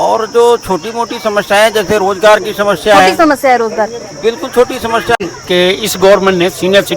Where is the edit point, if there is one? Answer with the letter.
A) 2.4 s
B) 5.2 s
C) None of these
B